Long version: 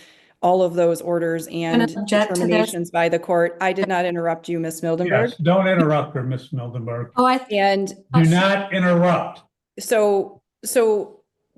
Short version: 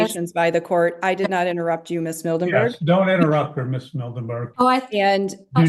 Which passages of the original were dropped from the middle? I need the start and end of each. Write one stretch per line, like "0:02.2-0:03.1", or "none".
none